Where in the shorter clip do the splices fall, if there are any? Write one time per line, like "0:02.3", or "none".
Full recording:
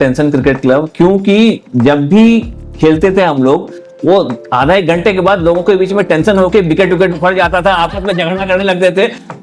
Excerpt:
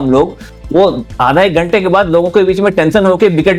none

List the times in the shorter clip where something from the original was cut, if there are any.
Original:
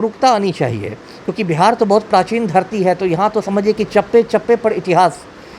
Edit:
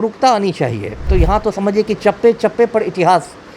0:01.1

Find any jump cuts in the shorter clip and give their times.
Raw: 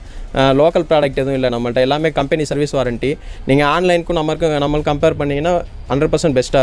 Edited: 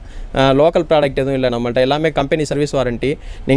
none

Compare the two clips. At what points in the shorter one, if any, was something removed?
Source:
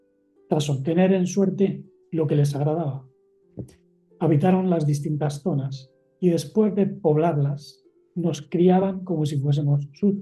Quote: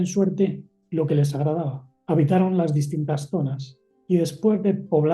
0:01.9

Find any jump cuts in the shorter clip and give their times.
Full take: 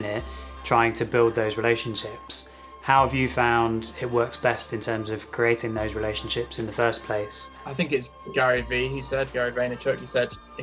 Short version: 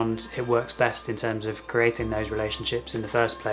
none

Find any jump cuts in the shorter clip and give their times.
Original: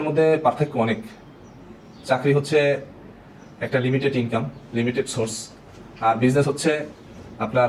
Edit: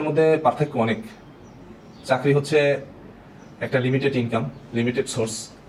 none

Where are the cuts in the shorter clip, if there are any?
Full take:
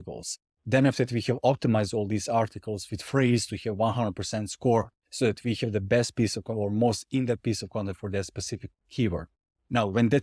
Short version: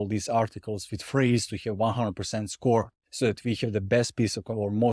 none

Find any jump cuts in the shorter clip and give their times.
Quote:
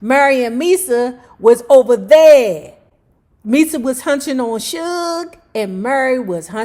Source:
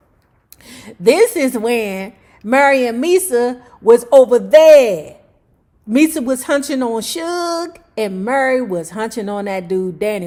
none

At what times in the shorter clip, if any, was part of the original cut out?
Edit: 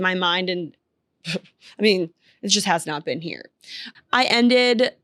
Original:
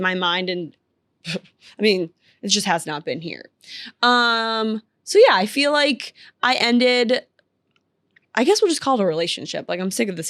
0:03.8

